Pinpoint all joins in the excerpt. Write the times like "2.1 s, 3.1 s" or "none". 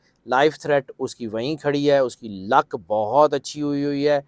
none